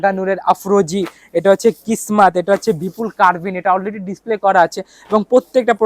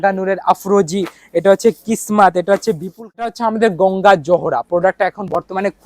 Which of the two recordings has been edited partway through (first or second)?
second